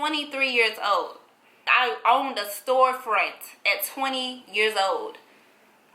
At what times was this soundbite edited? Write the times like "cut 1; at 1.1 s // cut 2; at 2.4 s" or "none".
cut 1; at 1.6 s